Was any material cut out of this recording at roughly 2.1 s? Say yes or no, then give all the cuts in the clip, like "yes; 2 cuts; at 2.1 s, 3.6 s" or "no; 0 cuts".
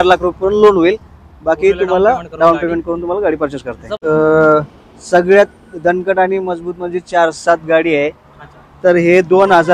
no; 1 cut; at 3.9 s